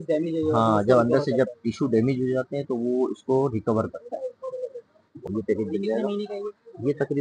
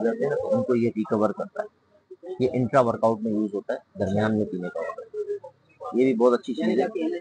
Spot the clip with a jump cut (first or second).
first